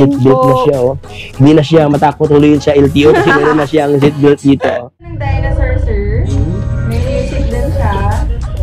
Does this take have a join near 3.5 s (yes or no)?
no